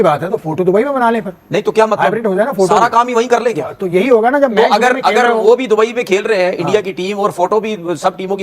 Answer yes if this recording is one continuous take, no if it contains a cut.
yes